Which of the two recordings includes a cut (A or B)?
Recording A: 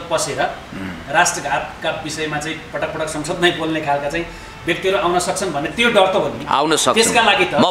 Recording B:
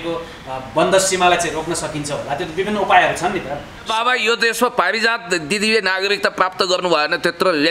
B